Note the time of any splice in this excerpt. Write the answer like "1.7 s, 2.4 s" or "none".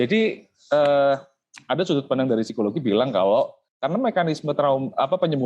3.7 s